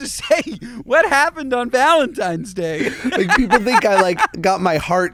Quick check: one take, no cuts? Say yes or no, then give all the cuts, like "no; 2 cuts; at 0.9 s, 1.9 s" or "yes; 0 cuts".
yes; 0 cuts